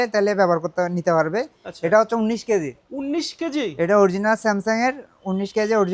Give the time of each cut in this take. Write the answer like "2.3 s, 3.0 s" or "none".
none

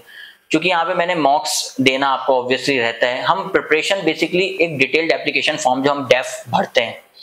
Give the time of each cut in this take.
none

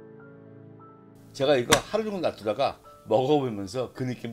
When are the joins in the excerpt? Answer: 1.2 s

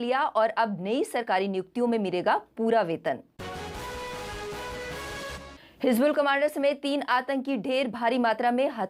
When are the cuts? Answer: none

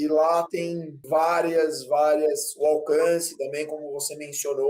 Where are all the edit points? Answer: 0.9 s

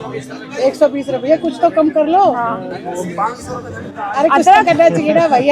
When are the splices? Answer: none

